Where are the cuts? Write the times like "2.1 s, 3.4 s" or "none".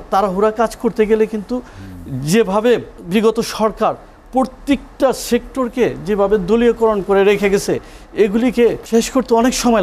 3.0 s, 8.8 s